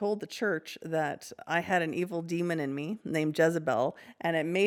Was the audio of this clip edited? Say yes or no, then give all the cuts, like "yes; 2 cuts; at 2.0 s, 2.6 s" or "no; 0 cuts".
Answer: no; 0 cuts